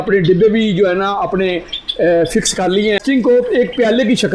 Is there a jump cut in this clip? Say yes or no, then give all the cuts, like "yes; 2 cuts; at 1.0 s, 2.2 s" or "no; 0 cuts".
yes; 1 cut; at 3.0 s